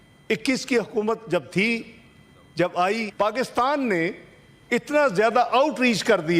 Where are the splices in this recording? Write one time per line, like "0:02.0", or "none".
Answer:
0:03.1